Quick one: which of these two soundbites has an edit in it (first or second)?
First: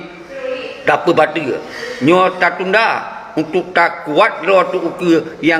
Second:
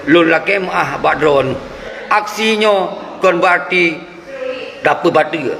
second